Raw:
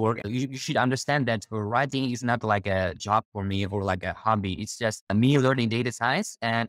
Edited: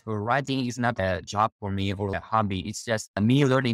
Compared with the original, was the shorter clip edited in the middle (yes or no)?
yes